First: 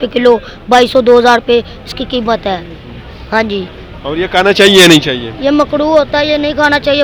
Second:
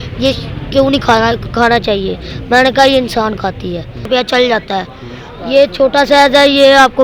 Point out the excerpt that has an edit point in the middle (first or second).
second